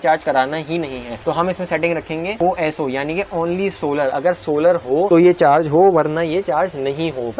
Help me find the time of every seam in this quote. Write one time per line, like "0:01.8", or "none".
none